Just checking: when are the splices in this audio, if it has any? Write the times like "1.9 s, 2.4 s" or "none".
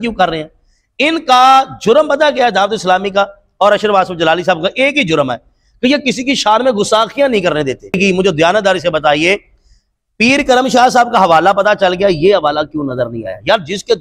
8.0 s